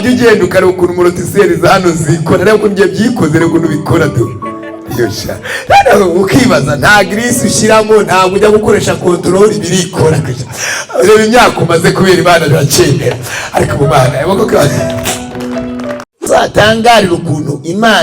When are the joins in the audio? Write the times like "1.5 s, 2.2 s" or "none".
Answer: 16.0 s

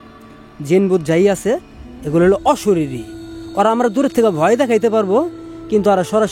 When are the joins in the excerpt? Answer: none

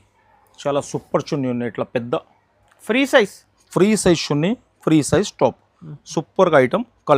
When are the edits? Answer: none

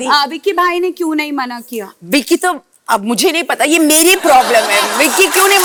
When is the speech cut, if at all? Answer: none

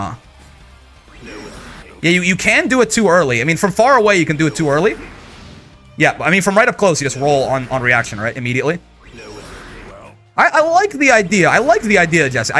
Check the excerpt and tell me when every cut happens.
none

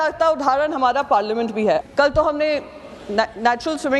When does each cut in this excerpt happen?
1.8 s

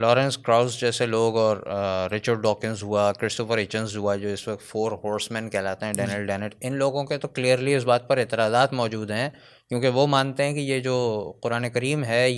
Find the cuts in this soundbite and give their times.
none

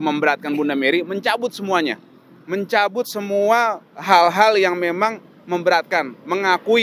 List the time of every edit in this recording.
none

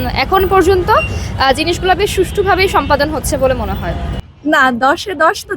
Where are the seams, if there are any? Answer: 4.0 s

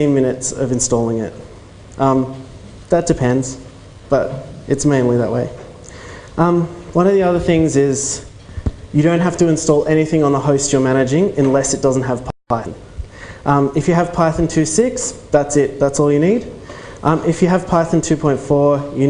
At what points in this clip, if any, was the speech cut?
11.7 s

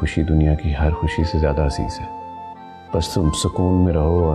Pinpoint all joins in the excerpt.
none

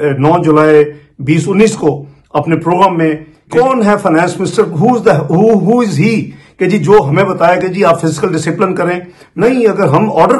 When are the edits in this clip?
3.3 s, 9.2 s

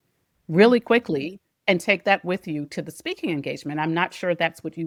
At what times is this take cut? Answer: none

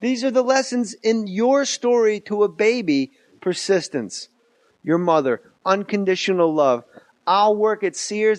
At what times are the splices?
6.0 s

